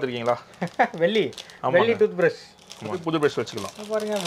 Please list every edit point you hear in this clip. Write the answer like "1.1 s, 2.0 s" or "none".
3.0 s